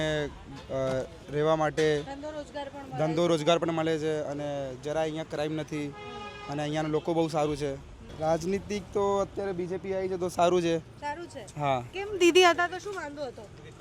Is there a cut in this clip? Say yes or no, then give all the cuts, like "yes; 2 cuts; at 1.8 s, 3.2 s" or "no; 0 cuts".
yes; 1 cut; at 8.1 s